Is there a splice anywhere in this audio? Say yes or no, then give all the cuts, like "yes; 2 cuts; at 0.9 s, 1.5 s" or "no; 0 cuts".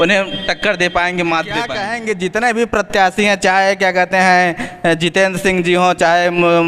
yes; 1 cut; at 1.9 s